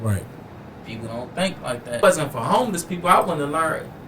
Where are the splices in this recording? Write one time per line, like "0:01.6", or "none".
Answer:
0:02.0